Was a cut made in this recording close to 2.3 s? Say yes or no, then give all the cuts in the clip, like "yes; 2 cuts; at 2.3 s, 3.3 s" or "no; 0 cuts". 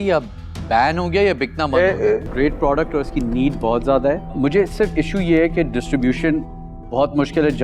yes; 1 cut; at 2.3 s